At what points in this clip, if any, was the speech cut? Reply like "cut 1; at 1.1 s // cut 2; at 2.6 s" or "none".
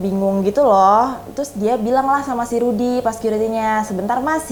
none